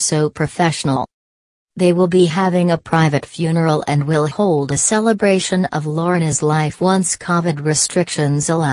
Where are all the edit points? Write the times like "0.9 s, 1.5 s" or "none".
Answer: none